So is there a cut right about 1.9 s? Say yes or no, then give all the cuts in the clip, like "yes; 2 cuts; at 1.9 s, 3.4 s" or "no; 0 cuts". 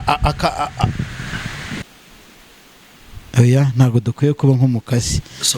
yes; 1 cut; at 1.9 s